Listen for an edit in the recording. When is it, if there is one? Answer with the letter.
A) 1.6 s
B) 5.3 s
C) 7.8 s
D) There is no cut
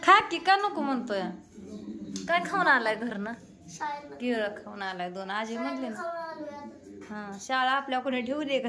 D